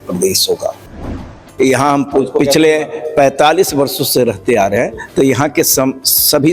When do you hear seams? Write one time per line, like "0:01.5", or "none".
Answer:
0:01.0